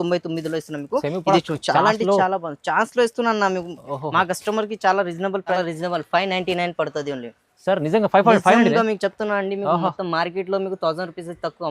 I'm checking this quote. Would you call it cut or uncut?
cut